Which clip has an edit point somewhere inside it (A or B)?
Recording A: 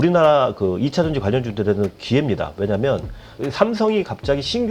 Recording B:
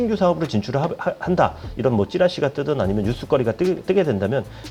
A